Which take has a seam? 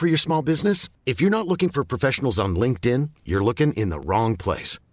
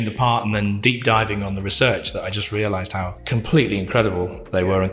second; 2 cuts; at 0.8 s, 3.2 s

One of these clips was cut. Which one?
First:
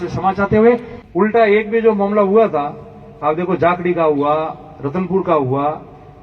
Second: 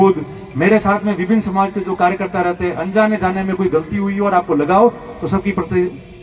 first; 1 cut; at 1.0 s

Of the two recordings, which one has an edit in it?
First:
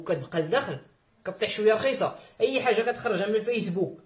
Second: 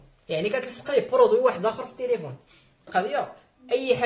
second; 1 cut; at 2.9 s

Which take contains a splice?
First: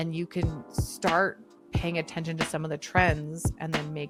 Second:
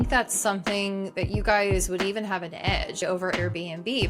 second; 1 cut; at 3.0 s

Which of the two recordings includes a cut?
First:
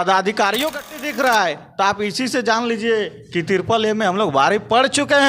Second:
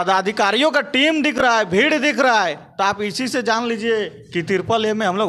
first; 1 cut; at 1.0 s

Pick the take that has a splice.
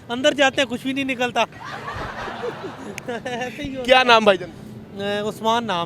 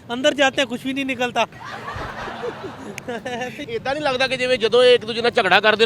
second; 1 cut; at 3.6 s

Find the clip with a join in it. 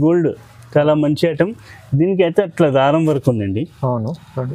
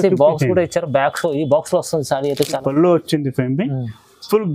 second; 1 cut; at 2.6 s

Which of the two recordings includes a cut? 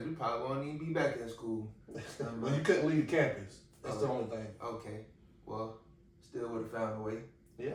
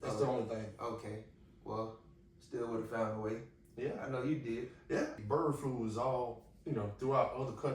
second; 1 cut; at 5.2 s

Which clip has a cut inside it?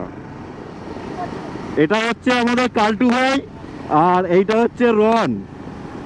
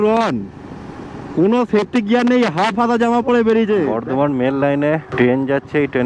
second; 2 cuts; at 4.0 s, 5.1 s

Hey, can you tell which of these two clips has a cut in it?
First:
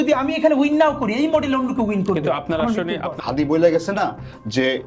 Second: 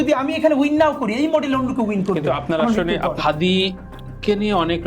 first; 1 cut; at 3.1 s

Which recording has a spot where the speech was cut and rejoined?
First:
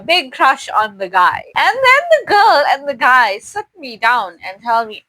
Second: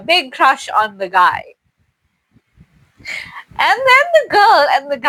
first; 1 cut; at 1.4 s

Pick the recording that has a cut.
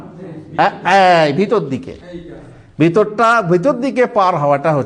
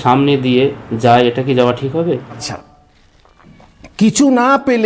second; 1 cut; at 2.5 s

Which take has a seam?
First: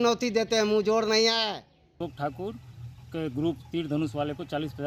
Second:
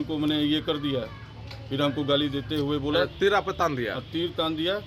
first; 1 cut; at 2.0 s

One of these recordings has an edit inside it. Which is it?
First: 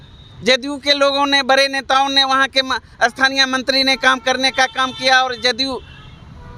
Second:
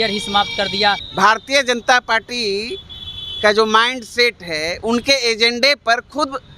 second; 1 cut; at 1.1 s

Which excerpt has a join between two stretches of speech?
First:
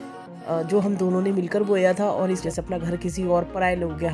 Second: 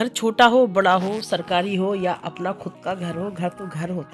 first; 1 cut; at 2.4 s

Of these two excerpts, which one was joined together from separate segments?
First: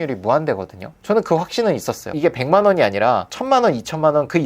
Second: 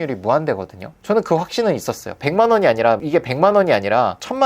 first; 1 cut; at 2.1 s

